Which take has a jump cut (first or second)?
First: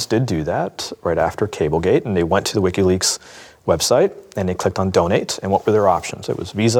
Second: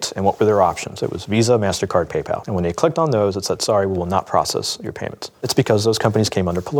second